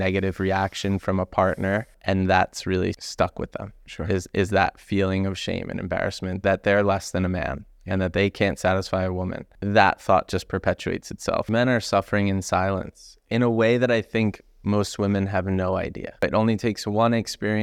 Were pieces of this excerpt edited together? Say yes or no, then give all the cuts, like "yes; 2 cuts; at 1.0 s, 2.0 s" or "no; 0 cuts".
yes; 5 cuts; at 1.9 s, 3.0 s, 9.5 s, 11.5 s, 16.2 s